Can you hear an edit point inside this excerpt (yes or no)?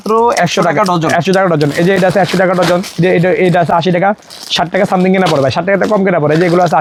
no